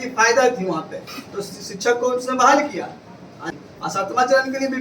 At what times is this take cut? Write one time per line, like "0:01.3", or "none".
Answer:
0:03.4